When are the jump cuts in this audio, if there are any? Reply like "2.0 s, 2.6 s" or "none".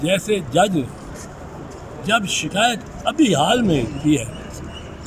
none

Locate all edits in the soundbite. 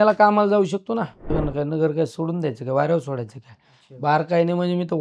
1.4 s

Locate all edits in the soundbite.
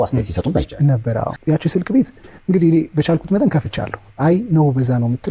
1.3 s

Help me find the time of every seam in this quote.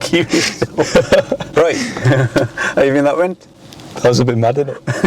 1.4 s

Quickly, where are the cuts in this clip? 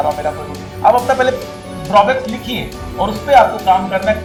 none

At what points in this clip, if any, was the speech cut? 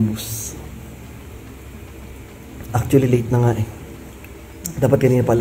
none

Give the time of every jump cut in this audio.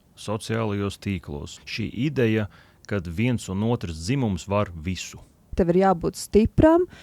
1.6 s, 5.5 s

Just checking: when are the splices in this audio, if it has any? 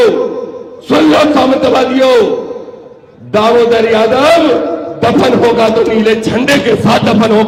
none

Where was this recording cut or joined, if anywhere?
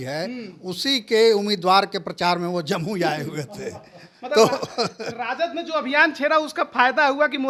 none

